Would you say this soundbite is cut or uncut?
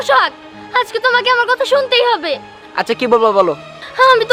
uncut